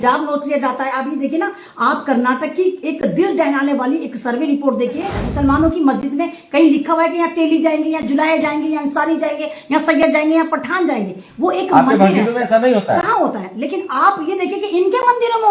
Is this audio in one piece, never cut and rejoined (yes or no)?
no